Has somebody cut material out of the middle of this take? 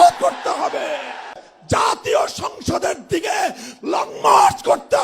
yes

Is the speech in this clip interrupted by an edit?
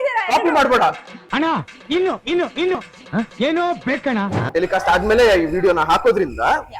yes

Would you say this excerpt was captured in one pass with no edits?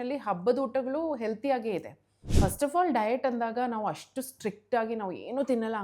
no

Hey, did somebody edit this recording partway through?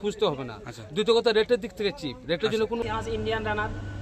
yes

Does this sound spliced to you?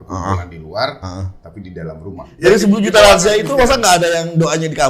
yes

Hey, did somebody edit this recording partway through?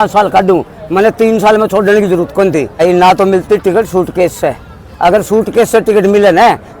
yes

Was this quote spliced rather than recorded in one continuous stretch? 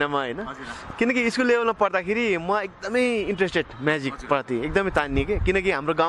no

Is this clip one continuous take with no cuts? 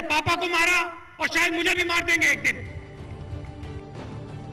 no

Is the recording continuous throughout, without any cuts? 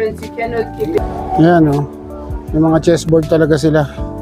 no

